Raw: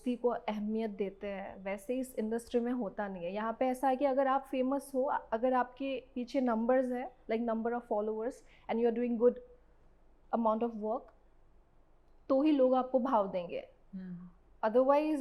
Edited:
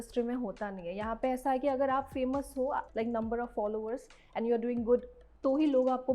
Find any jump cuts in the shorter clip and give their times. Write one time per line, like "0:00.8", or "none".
0:02.9
0:05.2